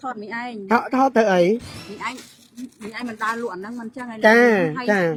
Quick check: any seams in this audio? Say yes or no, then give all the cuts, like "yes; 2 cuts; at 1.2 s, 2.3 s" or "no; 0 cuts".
no; 0 cuts